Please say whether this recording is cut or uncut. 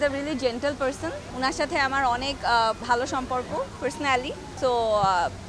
cut